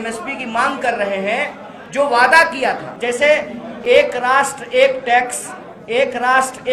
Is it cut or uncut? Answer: cut